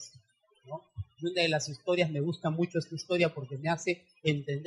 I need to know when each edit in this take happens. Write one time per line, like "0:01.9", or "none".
0:02.7